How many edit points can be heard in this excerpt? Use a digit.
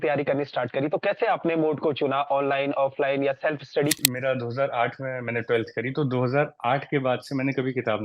1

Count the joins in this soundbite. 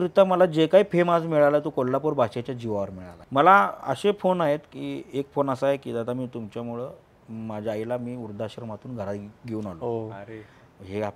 1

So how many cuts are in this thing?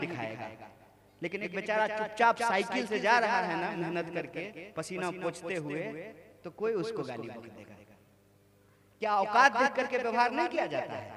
0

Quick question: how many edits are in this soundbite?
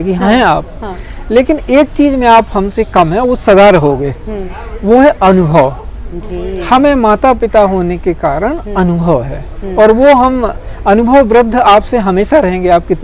0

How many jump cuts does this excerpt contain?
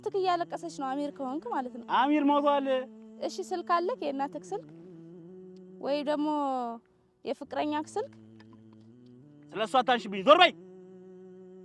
3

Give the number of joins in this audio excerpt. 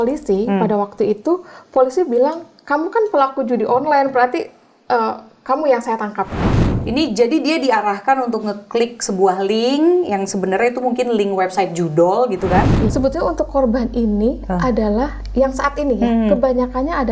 2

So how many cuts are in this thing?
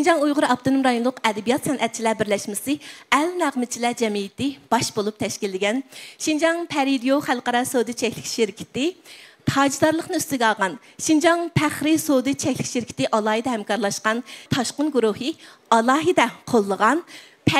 0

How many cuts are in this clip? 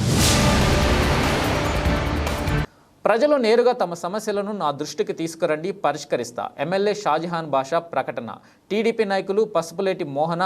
1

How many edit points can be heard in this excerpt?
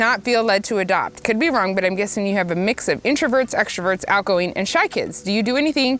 1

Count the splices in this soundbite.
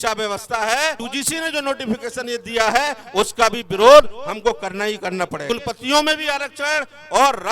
2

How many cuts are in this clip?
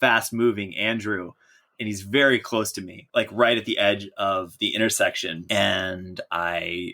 2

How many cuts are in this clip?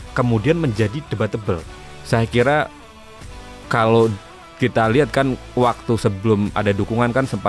1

